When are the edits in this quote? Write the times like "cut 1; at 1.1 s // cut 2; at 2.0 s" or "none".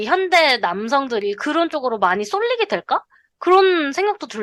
none